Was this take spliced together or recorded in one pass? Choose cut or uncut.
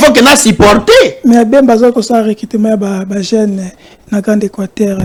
uncut